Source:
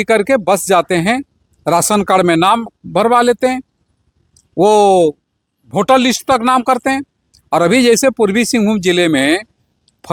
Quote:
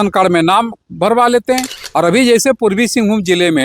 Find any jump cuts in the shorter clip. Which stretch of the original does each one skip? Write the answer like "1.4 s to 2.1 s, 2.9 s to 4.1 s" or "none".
3.7 s to 7.3 s

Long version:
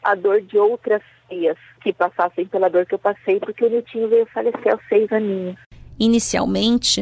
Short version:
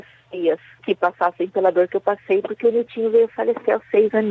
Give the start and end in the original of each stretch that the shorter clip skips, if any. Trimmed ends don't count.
none

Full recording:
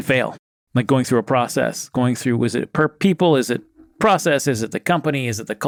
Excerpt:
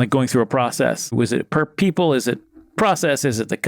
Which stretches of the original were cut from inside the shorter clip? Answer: 1.9 s to 2.4 s

